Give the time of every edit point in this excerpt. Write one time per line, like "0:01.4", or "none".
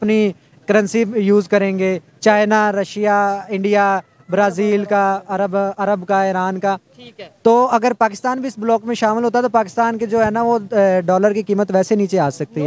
none